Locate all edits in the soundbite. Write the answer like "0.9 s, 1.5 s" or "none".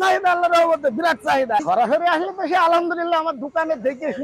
1.6 s